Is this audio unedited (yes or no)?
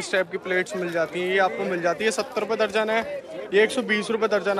yes